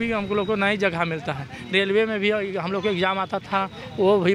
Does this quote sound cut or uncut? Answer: uncut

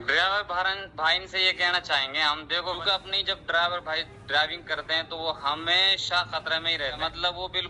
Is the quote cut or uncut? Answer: cut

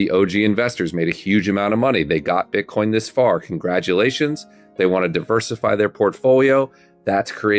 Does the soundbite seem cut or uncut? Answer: uncut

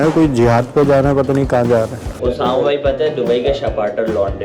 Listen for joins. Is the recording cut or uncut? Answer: cut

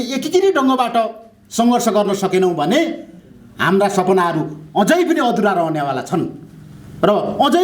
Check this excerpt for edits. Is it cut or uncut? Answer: uncut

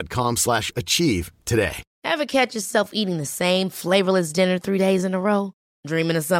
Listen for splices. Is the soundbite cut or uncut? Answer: cut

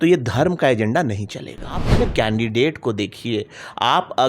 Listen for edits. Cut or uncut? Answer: cut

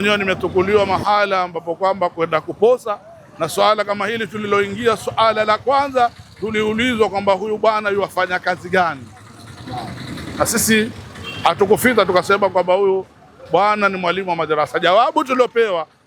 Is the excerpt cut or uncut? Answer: uncut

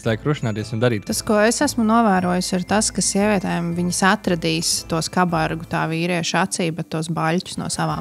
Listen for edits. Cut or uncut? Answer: cut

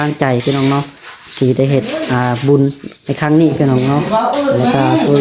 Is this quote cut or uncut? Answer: uncut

